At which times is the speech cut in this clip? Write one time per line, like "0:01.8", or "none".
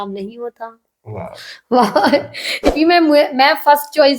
0:02.7